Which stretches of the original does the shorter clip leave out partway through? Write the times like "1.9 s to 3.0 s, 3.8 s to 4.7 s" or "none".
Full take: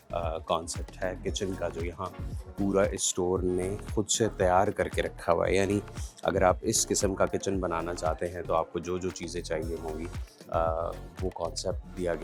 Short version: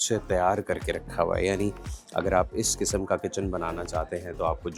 none